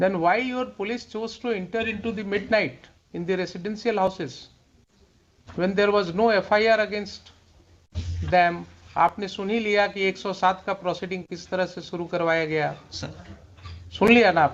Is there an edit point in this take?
no; 0 cuts

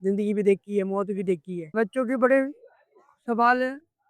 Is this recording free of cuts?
no; 1 cut; at 1.7 s

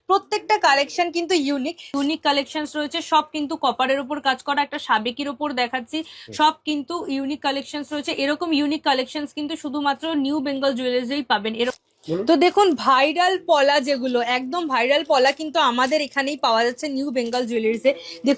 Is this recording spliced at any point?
yes; 2 cuts; at 1.9 s, 11.8 s

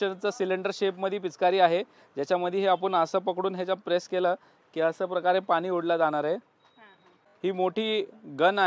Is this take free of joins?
yes; 0 cuts

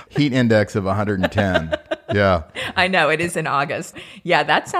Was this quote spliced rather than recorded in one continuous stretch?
yes; 2 cuts; at 2.6 s, 3.9 s

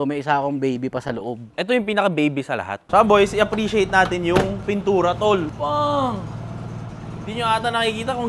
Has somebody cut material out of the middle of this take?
yes; 2 cuts; at 2.8 s, 5.5 s

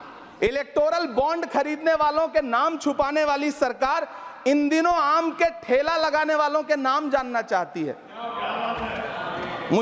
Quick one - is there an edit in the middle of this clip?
no; 0 cuts

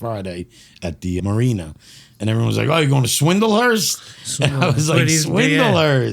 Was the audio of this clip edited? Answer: yes; 1 cut; at 1.2 s

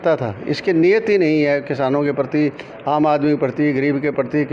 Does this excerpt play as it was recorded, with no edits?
yes; 0 cuts

